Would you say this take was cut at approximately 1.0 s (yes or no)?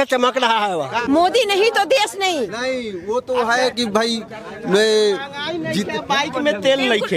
yes